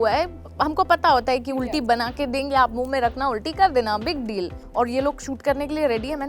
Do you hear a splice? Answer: yes; 1 cut; at 4.5 s

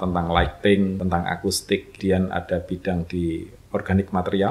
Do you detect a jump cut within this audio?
yes; 2 cuts; at 1.0 s, 2.0 s

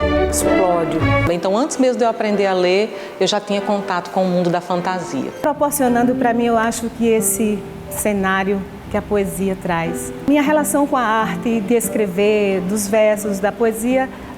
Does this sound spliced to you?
yes; 3 cuts; at 1.2 s, 5.5 s, 10.3 s

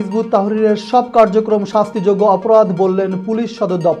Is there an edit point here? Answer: no; 0 cuts

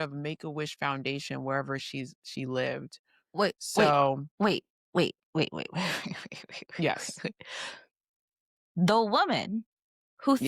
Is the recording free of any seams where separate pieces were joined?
yes; 0 cuts

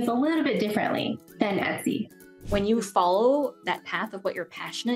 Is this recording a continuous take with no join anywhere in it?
no; 2 cuts; at 1.2 s, 2.4 s

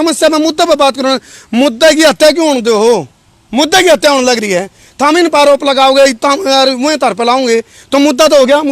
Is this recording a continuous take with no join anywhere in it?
yes; 0 cuts

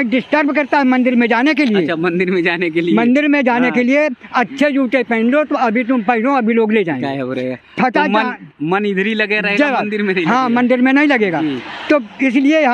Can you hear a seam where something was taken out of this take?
no; 0 cuts

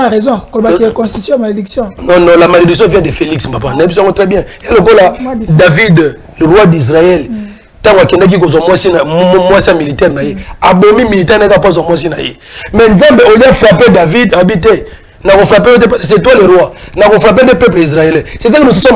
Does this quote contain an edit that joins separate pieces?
no; 0 cuts

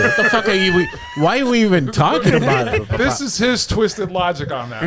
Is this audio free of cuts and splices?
no; 1 cut; at 2.9 s

